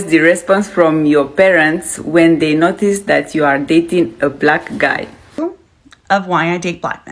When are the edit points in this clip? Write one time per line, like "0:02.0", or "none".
0:05.4